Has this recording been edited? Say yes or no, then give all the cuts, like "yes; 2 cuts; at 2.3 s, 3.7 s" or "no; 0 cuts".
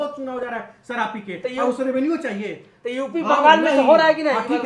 no; 0 cuts